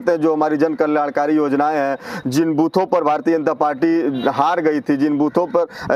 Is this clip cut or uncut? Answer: uncut